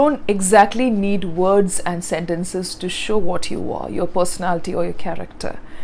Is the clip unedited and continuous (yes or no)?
yes